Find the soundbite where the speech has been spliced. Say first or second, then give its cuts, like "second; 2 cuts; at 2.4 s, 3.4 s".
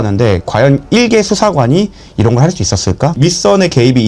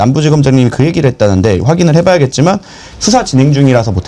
first; 1 cut; at 3.2 s